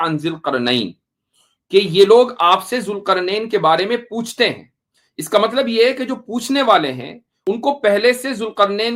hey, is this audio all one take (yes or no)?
yes